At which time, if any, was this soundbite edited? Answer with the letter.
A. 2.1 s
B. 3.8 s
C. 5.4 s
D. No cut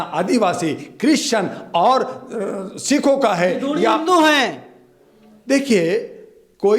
D